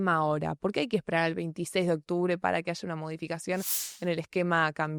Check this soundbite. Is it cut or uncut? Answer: uncut